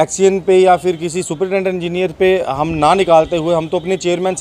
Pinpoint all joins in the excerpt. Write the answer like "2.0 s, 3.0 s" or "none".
none